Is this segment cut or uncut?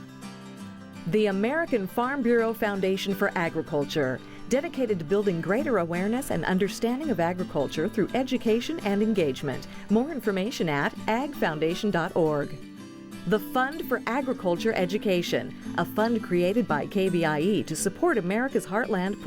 cut